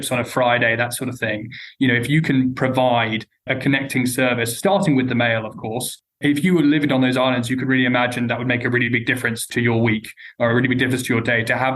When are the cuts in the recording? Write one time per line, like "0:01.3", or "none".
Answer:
0:06.1
0:09.5